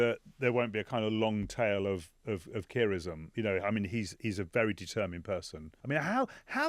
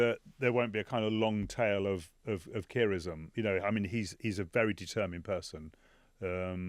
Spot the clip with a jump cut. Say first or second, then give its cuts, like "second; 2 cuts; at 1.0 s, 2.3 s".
first; 1 cut; at 5.7 s